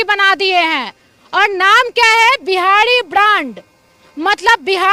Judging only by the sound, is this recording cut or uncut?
uncut